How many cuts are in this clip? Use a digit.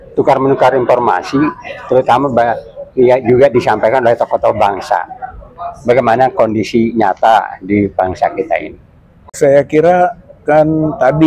1